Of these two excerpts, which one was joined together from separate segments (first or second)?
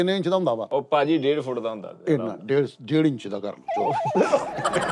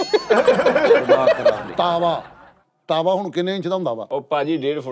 second